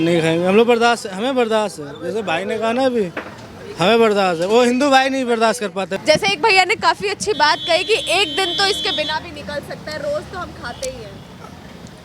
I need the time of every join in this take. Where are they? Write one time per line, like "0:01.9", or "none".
0:05.9